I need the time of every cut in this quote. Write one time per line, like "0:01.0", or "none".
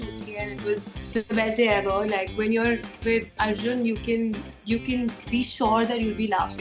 none